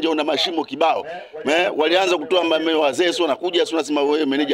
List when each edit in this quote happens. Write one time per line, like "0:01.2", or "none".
none